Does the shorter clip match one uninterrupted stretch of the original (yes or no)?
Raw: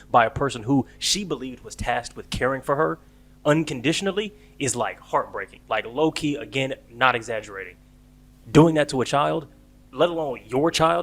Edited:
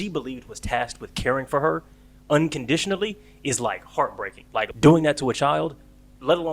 no